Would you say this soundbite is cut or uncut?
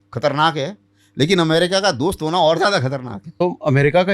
cut